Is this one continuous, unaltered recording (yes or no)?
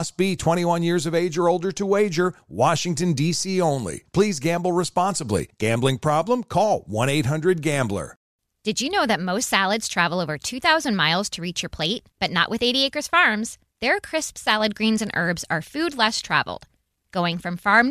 no